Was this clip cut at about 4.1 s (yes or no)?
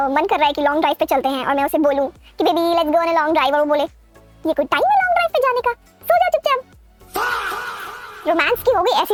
no